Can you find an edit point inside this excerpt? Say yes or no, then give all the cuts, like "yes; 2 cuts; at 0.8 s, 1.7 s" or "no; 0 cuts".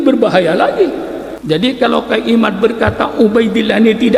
yes; 1 cut; at 1.3 s